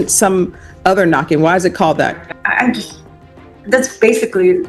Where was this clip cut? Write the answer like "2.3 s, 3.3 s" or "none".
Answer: 2.3 s